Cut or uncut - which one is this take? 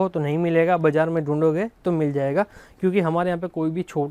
uncut